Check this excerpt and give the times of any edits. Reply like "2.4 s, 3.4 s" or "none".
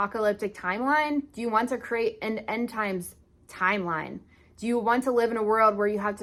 none